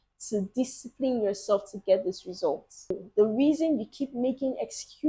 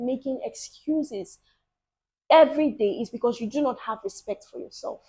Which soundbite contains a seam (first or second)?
first